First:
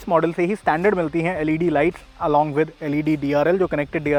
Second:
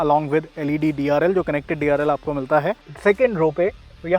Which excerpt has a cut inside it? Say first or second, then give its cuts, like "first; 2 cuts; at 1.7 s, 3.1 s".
second; 1 cut; at 2.9 s